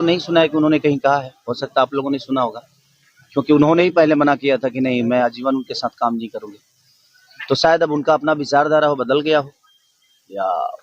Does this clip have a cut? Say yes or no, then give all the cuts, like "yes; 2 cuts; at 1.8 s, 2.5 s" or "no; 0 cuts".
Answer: no; 0 cuts